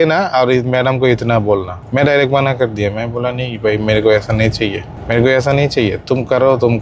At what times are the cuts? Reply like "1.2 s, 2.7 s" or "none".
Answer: 1.8 s, 4.9 s

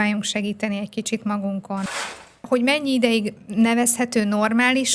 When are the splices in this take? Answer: 1.9 s

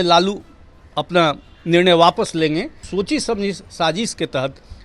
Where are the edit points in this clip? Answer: 2.8 s

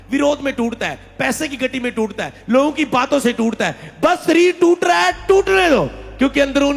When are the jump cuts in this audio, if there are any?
none

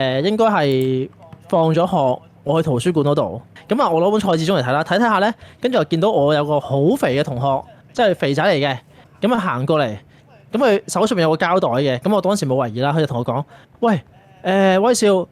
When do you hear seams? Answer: 3.5 s

